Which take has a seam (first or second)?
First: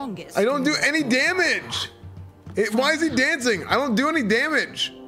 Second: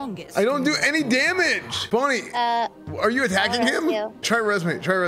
second